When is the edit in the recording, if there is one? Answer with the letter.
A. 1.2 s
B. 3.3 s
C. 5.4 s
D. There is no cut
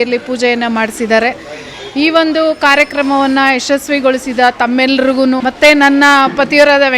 C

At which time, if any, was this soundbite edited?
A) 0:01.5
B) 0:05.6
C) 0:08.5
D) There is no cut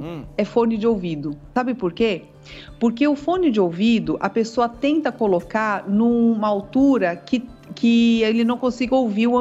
A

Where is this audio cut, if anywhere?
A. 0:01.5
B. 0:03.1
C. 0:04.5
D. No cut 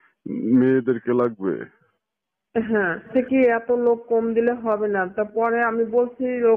B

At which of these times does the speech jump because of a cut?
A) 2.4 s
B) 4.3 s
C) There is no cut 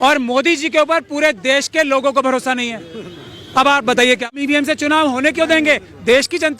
B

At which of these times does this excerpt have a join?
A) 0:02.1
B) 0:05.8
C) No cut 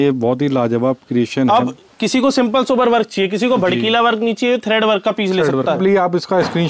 B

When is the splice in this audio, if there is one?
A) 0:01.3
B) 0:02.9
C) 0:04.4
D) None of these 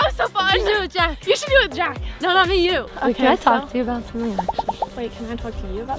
B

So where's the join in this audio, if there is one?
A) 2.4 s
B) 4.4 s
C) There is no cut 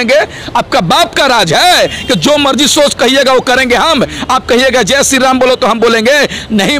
C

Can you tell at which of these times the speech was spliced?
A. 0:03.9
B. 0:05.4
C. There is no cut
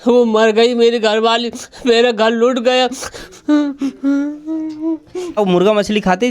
B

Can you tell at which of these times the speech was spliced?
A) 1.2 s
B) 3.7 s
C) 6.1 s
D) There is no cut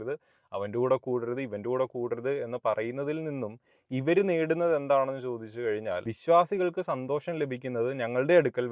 D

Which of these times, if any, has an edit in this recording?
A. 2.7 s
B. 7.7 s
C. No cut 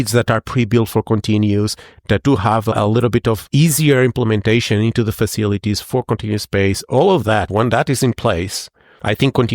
A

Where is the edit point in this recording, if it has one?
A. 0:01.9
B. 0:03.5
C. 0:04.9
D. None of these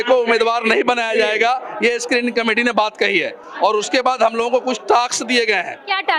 D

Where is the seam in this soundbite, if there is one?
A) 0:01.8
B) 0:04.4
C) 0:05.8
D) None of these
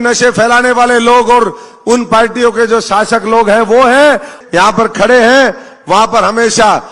B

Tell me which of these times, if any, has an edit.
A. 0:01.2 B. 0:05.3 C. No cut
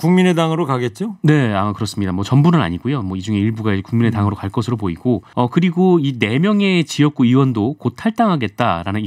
B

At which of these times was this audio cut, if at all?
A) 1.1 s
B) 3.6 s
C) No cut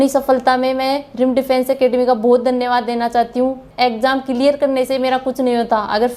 B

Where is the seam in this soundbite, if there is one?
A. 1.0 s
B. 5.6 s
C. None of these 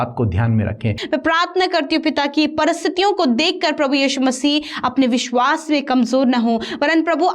A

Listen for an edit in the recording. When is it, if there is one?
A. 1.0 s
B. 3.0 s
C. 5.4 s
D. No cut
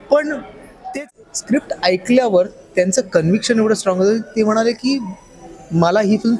A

